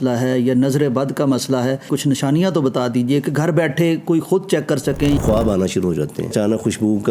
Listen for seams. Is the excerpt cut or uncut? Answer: cut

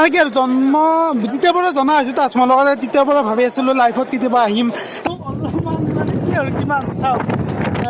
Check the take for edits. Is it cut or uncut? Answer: cut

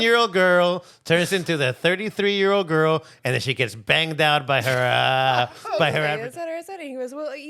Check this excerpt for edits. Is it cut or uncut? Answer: cut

